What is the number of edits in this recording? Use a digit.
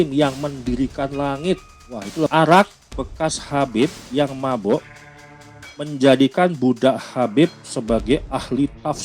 1